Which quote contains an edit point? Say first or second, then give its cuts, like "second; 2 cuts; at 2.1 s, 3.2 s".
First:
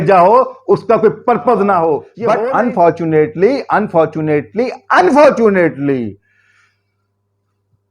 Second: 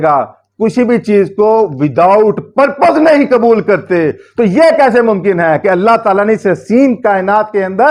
first; 1 cut; at 2.1 s